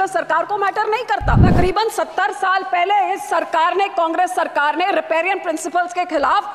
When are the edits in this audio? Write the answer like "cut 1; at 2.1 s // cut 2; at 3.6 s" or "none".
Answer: cut 1; at 1.5 s